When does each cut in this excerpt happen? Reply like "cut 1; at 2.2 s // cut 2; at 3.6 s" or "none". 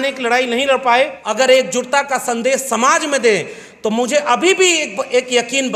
cut 1; at 1.2 s